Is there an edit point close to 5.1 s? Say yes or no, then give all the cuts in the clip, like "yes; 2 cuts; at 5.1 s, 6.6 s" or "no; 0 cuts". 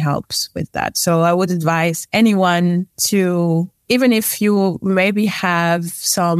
no; 3 cuts; at 2.0 s, 3.0 s, 3.8 s